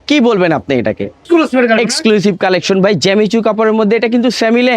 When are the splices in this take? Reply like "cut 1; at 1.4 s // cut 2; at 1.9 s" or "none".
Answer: cut 1; at 1.2 s